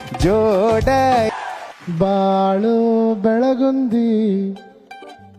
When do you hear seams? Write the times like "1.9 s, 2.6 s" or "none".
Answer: 1.3 s